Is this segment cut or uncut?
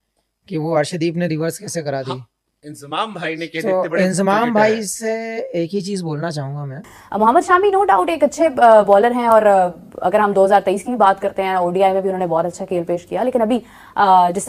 cut